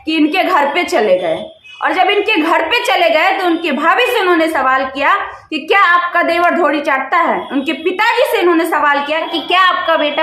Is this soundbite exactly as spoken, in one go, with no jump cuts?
yes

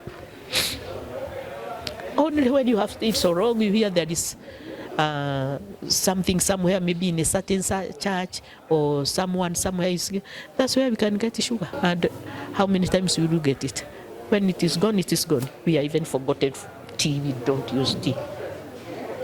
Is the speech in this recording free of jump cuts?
no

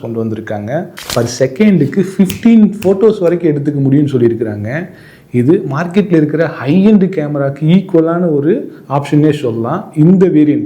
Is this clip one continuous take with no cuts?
no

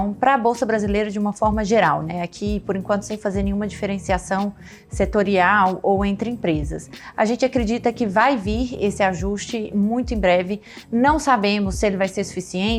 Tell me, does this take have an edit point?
no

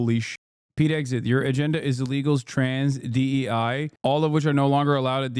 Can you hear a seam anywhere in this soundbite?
no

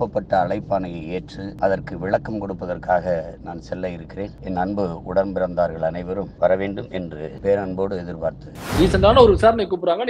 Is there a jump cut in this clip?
yes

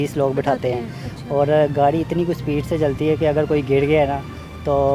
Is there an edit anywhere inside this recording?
no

